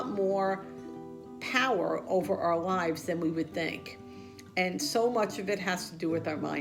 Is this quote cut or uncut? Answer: uncut